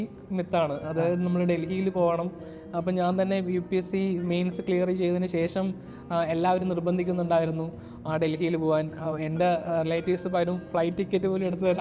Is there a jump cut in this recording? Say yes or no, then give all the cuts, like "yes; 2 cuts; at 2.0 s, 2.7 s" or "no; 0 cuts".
no; 0 cuts